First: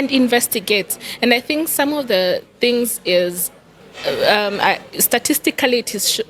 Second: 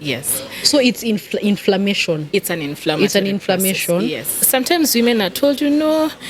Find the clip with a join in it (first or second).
second